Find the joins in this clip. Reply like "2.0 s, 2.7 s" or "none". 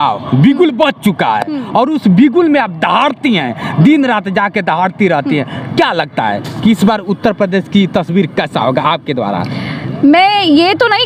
none